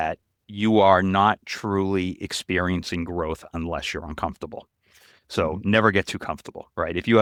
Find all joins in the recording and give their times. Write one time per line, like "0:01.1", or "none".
none